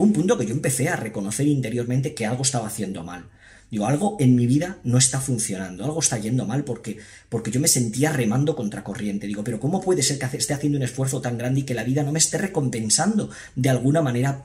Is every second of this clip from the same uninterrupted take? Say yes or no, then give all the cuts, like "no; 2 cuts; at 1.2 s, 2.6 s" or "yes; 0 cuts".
yes; 0 cuts